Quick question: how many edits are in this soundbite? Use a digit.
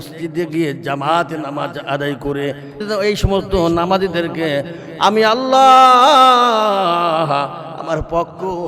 1